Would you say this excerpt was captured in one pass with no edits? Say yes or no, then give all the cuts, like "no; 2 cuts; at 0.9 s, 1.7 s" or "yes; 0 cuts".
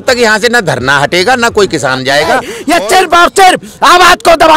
no; 1 cut; at 2.5 s